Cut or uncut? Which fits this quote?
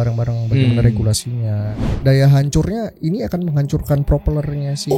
cut